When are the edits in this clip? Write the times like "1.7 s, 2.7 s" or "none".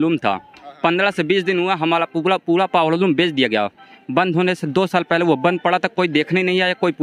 none

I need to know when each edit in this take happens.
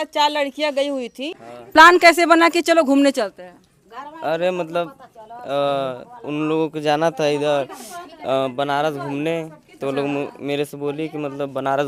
none

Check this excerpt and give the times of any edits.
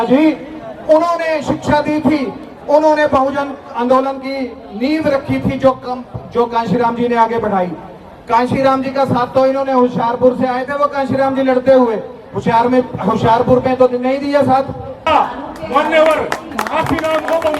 15.0 s

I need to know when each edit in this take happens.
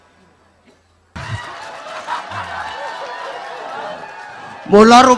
1.1 s

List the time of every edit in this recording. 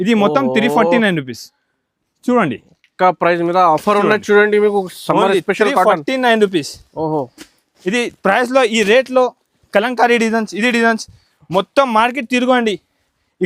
none

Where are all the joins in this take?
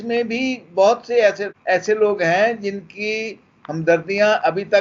1.5 s

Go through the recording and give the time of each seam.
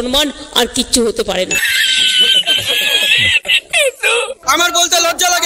4.4 s

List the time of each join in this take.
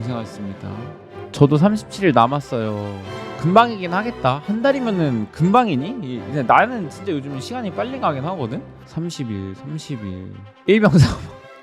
8.7 s

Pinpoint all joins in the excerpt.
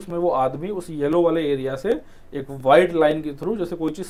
none

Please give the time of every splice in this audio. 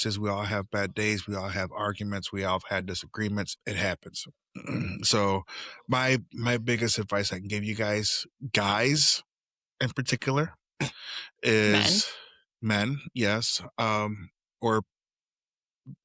3.6 s

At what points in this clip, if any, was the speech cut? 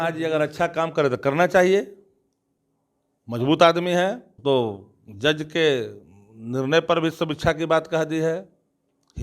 4.3 s

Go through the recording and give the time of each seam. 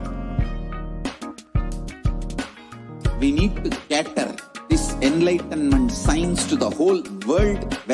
none

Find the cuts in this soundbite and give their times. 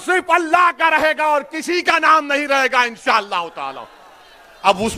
none

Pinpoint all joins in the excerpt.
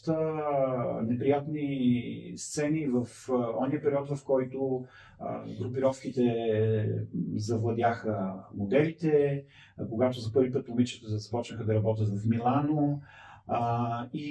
none

